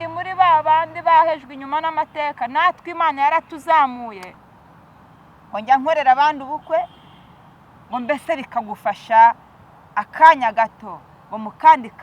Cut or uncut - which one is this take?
cut